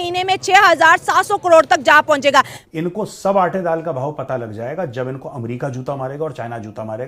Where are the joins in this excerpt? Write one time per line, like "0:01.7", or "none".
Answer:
0:02.6